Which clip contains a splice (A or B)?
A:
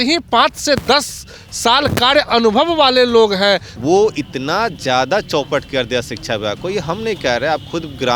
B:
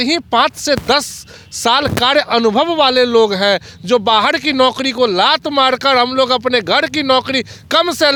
A